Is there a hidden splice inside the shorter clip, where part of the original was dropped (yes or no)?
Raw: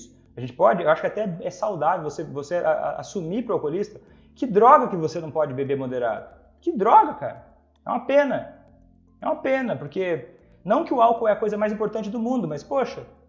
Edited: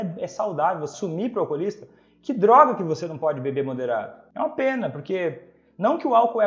yes